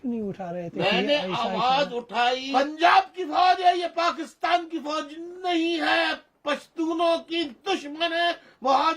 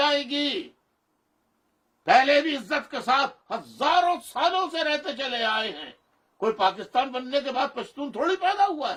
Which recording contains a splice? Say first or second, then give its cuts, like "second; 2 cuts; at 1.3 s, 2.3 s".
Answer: first; 1 cut; at 2.4 s